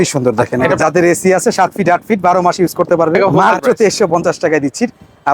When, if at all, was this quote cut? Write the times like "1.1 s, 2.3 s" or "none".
0.8 s, 3.4 s